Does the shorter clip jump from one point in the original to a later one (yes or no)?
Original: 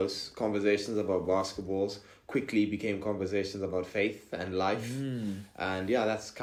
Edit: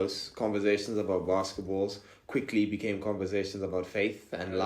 no